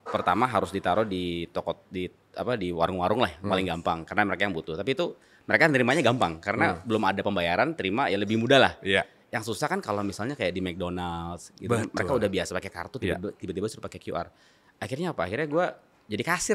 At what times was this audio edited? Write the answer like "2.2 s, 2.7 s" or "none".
none